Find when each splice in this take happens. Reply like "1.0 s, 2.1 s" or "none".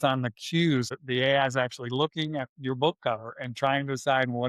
0.9 s